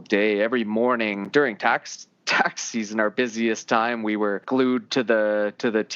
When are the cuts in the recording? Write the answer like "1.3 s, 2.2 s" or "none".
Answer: 1.2 s, 4.4 s